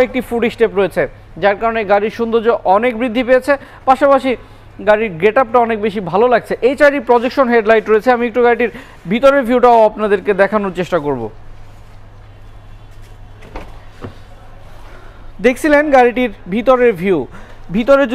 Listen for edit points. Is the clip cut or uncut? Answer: uncut